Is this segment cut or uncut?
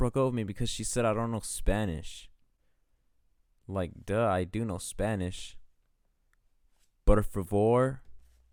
uncut